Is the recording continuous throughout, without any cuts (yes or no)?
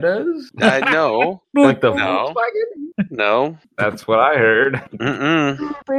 yes